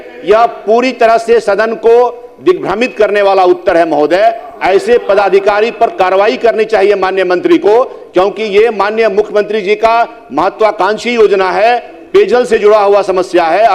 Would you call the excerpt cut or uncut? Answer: uncut